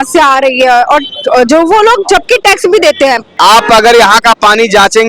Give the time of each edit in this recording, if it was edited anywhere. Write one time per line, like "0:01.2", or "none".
0:03.3